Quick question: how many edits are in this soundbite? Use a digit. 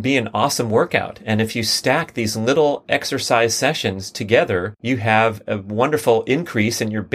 1